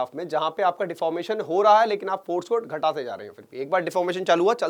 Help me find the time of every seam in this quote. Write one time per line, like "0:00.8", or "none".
none